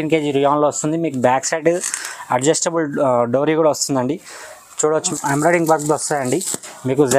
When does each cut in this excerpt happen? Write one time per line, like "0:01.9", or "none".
0:05.1